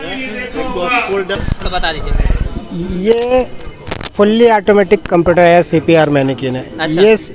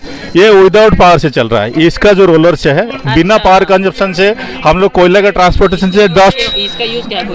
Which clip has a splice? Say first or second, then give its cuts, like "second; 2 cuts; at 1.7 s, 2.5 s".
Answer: first; 1 cut; at 1.4 s